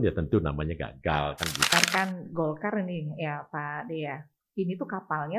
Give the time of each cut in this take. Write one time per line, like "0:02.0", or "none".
0:01.7